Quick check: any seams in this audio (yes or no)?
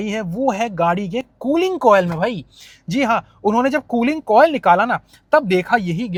no